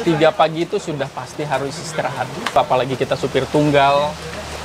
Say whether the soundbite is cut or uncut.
cut